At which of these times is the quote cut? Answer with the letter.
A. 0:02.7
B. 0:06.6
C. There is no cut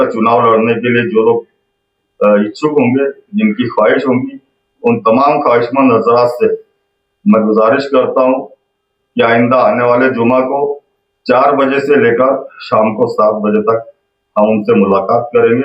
C